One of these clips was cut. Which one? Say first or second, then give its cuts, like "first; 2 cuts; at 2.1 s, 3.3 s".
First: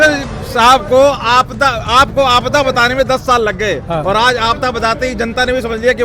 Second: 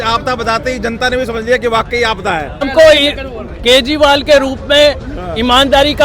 second; 1 cut; at 2.7 s